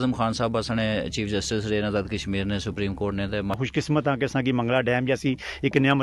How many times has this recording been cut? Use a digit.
1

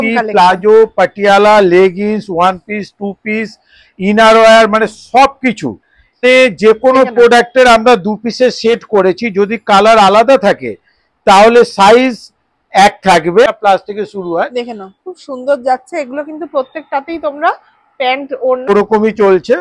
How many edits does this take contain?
3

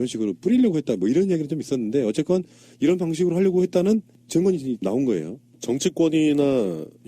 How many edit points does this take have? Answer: 1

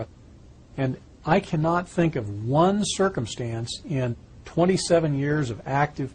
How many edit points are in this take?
1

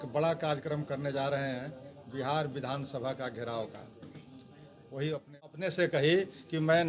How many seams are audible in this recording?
1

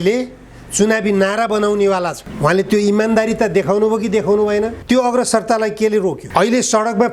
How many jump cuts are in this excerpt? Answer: 3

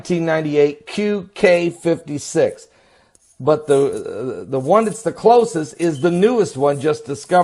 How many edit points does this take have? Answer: 1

